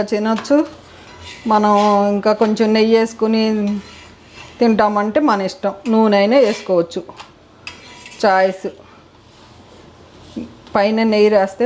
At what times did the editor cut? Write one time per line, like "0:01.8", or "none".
none